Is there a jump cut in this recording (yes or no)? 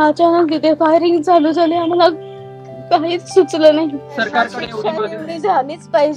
yes